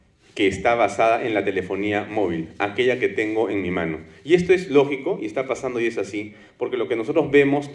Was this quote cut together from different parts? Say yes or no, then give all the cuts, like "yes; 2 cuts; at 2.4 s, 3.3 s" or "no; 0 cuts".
no; 0 cuts